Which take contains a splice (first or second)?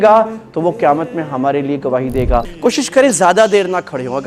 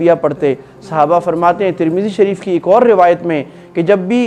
first